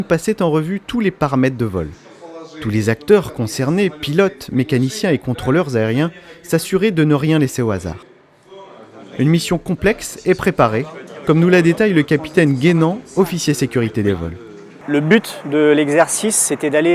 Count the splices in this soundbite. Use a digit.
1